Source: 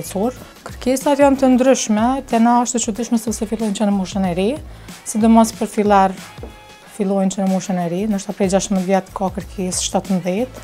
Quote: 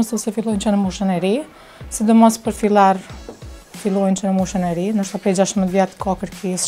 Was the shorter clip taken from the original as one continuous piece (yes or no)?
yes